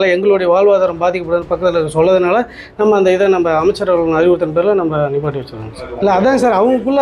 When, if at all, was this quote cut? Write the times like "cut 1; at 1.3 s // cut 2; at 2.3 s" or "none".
cut 1; at 5.9 s